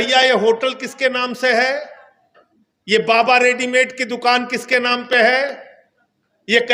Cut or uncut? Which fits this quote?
uncut